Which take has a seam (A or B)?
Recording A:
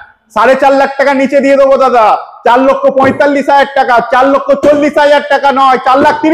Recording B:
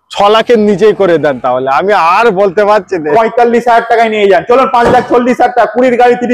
B